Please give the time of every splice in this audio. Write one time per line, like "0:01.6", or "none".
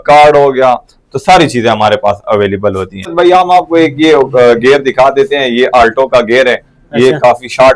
0:03.1

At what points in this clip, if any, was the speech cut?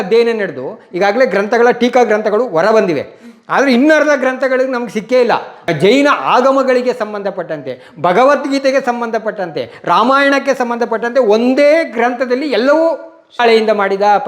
0:05.5
0:13.4

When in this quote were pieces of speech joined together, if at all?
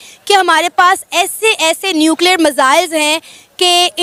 none

